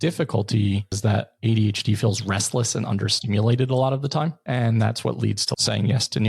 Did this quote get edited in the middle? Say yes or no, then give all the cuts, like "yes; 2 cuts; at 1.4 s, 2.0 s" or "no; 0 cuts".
yes; 3 cuts; at 1.0 s, 4.4 s, 5.5 s